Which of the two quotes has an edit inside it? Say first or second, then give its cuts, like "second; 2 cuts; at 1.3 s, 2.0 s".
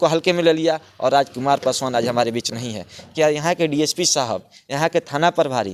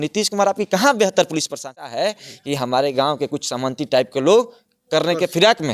second; 1 cut; at 1.8 s